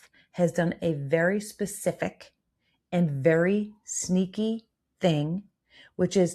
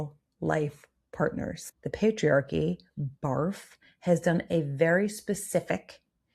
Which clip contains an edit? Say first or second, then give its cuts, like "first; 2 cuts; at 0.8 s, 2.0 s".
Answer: second; 1 cut; at 1.6 s